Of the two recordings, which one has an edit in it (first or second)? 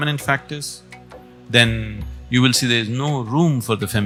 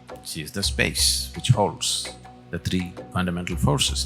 second